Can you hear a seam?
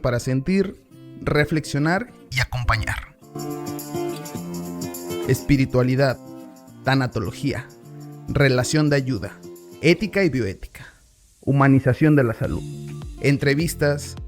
yes; 1 cut; at 12.2 s

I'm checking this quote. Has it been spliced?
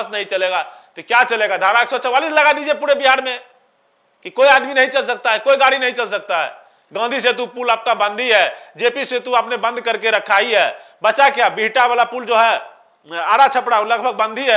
no; 0 cuts

